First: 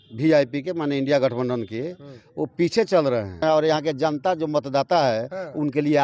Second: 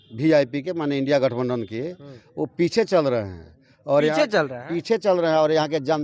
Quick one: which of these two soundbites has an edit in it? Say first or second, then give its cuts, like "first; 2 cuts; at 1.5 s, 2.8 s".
first; 1 cut; at 3.4 s